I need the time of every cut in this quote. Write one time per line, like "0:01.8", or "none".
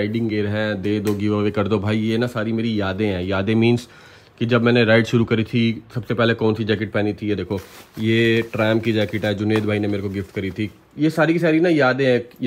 none